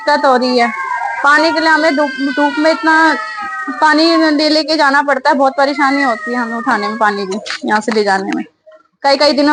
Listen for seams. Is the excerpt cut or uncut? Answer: uncut